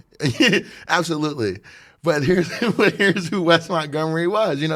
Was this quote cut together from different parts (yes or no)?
no